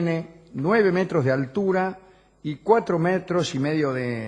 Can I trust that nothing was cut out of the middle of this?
no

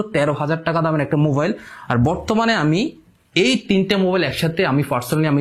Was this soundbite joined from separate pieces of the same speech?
no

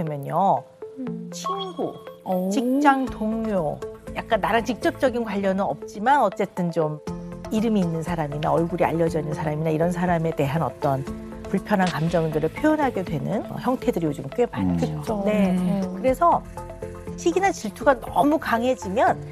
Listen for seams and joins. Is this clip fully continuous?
yes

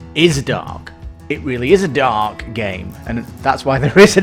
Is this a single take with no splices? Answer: yes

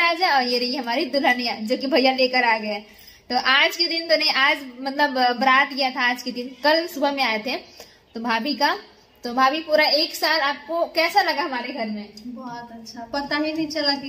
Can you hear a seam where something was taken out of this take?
no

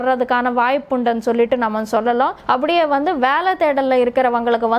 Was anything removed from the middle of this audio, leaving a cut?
yes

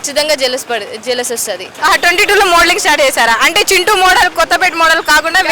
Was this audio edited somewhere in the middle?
yes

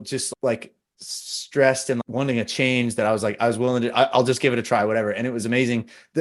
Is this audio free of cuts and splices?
no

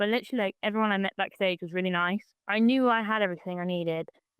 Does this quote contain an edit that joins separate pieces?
yes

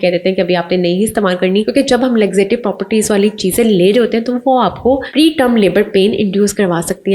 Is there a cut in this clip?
yes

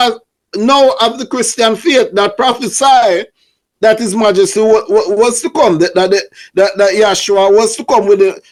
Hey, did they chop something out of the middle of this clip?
no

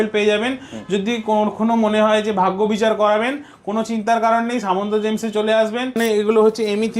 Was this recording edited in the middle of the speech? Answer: yes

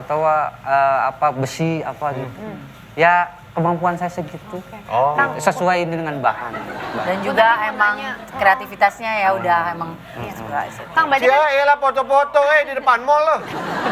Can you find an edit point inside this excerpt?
no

